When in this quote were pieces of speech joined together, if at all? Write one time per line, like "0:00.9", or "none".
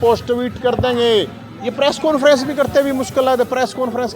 none

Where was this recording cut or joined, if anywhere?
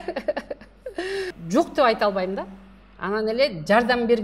0:01.3

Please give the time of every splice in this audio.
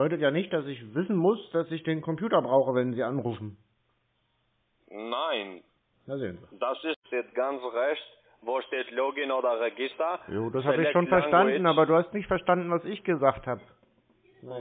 0:07.0

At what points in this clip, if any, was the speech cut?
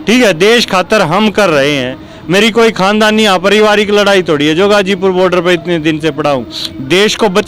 none

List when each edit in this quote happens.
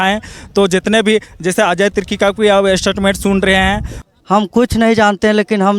0:04.0

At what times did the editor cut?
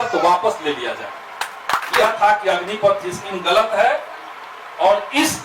0:02.0

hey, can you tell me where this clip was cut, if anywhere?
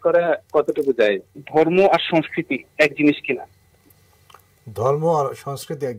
0:01.3

